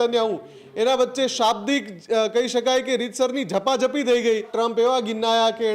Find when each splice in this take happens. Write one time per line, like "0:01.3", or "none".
0:04.5